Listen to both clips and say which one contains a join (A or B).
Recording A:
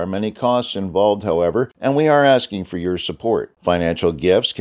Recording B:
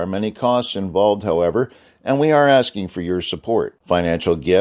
A